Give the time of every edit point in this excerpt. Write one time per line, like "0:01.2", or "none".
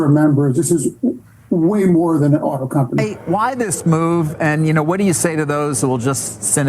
0:03.1